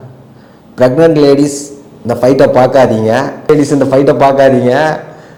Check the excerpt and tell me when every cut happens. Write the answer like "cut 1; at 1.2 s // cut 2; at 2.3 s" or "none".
none

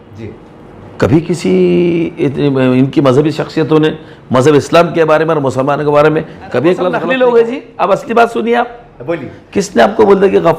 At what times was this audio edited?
cut 1; at 7.0 s

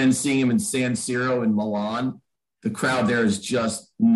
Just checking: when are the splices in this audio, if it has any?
none

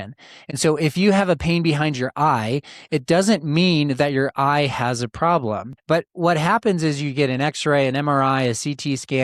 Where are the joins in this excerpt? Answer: cut 1; at 5.7 s

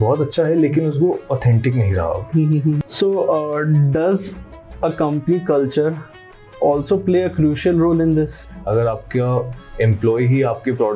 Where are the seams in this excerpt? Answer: cut 1; at 2.8 s // cut 2; at 8.5 s

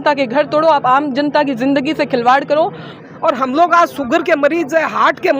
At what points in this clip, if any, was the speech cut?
cut 1; at 2.9 s

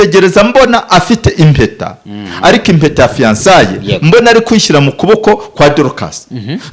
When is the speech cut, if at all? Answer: none

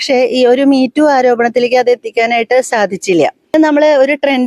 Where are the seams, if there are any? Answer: cut 1; at 3.5 s

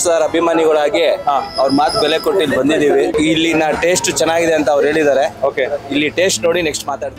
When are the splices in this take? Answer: cut 1; at 3.1 s

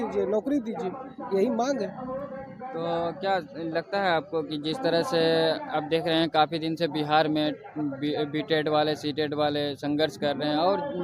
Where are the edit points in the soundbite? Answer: none

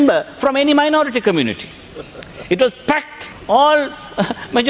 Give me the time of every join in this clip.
cut 1; at 3.3 s

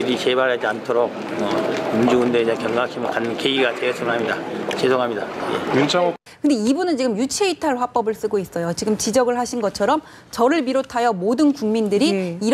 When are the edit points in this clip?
cut 1; at 6.3 s

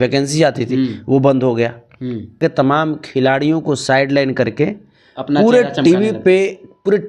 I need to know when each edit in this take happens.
cut 1; at 2.4 s

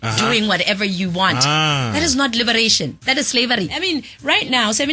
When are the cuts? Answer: cut 1; at 3.8 s

